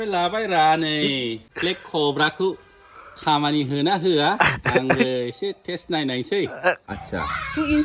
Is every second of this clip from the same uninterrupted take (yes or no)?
no